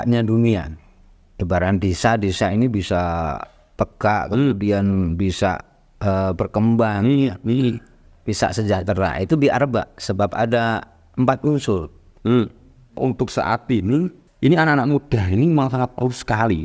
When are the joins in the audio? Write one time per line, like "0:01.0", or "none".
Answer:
0:13.0
0:14.2